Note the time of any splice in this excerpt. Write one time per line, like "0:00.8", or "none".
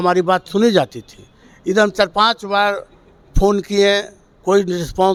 none